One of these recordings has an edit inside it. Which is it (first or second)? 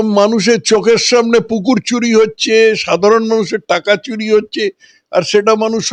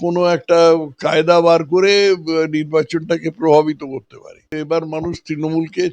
second